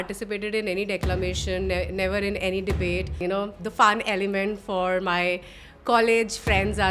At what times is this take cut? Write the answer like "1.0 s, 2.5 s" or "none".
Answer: 3.2 s